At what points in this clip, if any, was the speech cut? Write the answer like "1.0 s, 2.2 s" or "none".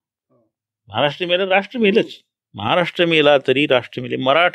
none